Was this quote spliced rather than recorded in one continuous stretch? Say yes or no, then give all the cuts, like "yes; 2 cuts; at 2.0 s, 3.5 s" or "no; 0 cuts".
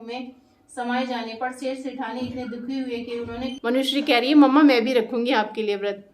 yes; 1 cut; at 3.5 s